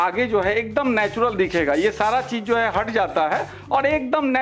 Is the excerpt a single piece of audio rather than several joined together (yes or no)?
yes